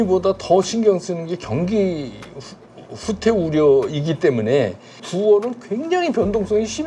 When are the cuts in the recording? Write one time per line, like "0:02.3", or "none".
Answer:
0:05.1